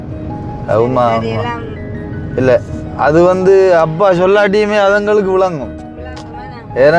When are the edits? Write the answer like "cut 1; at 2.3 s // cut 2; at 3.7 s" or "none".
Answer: none